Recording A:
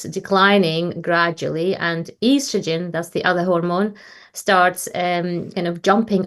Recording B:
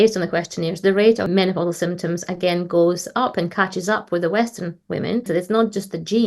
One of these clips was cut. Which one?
B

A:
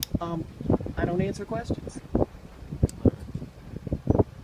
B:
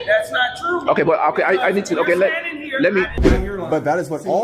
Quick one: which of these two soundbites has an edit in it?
B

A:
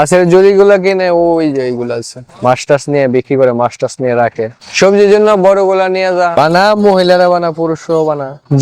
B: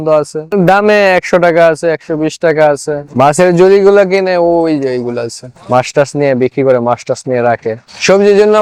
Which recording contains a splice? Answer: A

